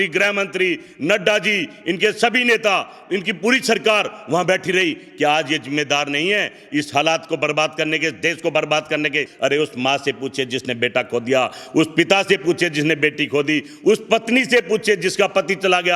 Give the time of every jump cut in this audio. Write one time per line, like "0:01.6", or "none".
none